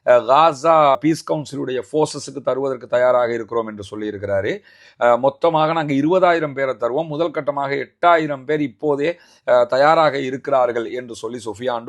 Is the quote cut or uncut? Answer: uncut